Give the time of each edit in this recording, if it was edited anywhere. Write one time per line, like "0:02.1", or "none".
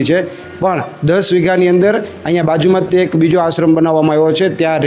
none